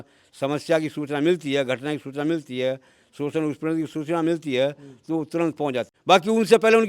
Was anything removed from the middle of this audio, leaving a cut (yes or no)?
yes